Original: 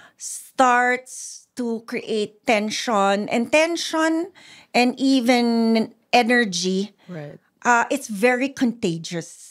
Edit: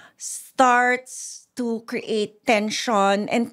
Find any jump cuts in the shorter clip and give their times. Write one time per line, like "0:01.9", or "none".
none